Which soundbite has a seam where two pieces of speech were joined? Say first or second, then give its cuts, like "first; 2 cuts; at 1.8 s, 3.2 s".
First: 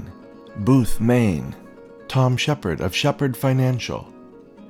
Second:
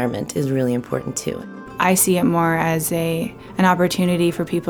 second; 1 cut; at 1.4 s